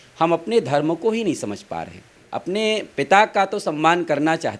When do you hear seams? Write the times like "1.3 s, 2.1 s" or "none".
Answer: 2.2 s